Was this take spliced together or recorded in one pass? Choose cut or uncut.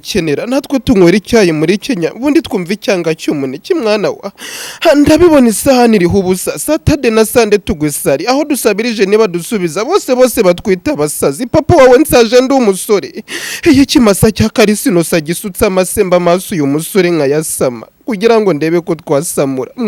uncut